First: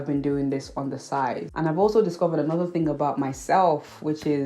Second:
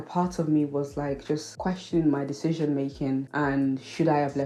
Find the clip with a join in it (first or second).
first